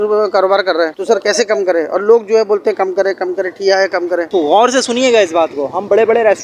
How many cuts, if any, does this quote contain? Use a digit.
1